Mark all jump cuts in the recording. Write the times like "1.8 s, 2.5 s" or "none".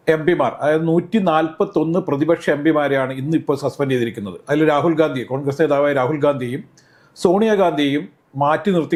none